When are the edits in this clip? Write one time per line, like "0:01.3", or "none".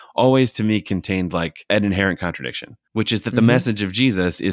0:01.6